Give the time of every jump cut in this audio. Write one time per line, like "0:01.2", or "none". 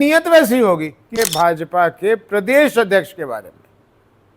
0:01.2